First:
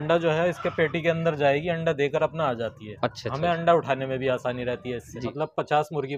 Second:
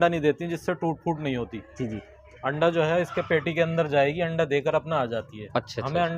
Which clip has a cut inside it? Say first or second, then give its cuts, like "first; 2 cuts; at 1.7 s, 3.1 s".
first; 1 cut; at 5.2 s